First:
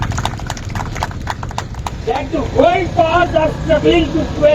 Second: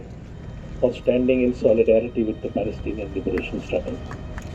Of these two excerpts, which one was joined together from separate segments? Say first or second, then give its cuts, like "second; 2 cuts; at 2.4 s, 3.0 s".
first; 1 cut; at 2.0 s